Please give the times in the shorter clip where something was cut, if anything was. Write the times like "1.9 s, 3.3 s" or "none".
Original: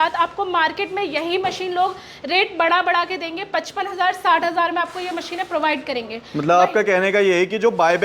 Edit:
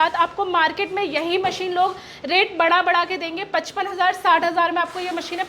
none